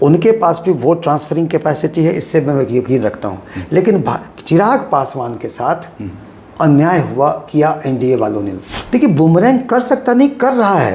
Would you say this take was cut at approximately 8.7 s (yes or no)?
yes